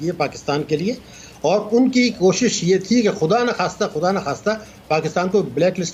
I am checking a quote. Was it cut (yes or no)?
no